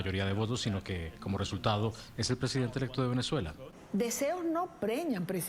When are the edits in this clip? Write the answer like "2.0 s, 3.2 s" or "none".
3.7 s